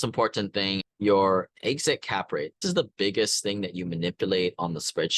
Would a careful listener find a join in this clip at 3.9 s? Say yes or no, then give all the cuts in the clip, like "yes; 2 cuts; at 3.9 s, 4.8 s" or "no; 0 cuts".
no; 2 cuts; at 0.8 s, 2.6 s